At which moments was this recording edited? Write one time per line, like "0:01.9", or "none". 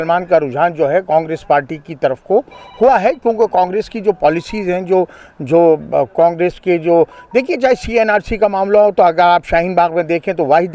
none